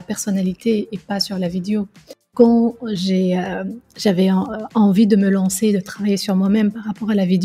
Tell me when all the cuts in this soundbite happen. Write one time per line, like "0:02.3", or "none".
0:02.3